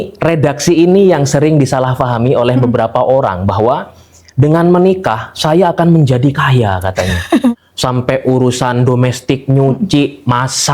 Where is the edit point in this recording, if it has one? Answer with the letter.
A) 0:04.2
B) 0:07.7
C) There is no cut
B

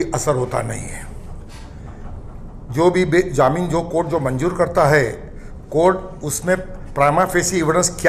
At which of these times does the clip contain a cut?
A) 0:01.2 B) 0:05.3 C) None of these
C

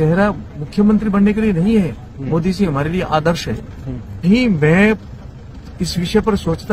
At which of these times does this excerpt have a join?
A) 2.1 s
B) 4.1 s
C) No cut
B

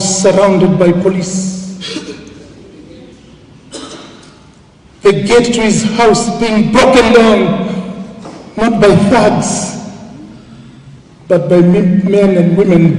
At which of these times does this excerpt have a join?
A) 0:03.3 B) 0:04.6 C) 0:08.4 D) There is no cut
D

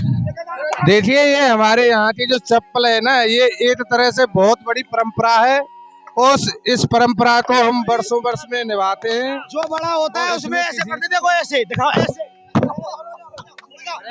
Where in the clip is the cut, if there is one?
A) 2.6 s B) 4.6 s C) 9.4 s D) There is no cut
C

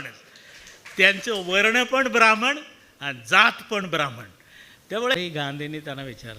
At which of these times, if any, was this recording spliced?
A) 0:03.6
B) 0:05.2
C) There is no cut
B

